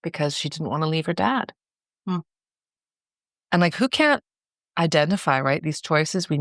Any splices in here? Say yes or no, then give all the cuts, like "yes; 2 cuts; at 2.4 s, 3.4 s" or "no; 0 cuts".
no; 0 cuts